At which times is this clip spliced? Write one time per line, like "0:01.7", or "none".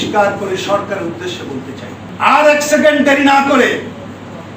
0:02.0

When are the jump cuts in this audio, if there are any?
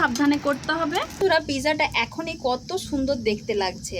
0:01.2

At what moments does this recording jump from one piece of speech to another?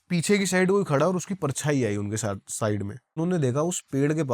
0:03.2

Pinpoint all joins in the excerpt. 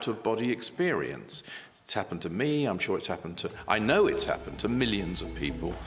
none

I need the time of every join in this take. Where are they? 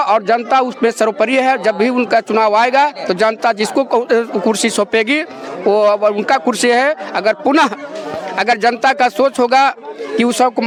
none

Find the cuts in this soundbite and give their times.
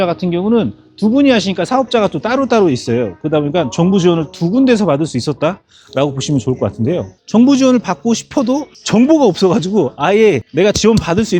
0:07.1

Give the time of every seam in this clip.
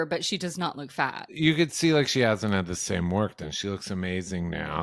0:01.3

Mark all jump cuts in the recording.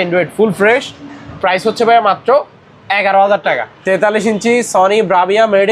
0:03.7

